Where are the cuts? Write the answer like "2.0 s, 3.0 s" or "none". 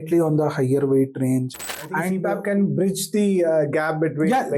2.2 s

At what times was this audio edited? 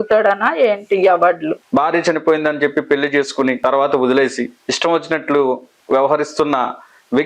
1.6 s, 3.6 s, 4.6 s, 5.7 s

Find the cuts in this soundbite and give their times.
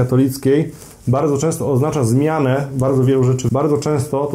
3.4 s

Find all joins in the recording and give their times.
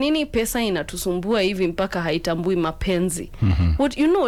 none

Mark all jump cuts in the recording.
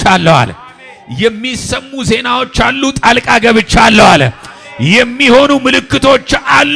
none

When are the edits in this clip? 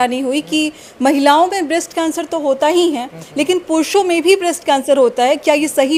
none

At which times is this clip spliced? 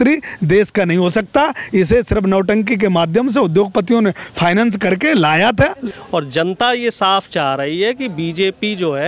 5.8 s

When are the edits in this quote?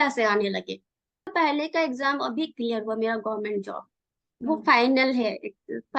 1.3 s

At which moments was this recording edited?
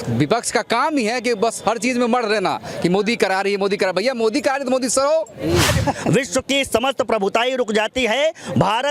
5.8 s

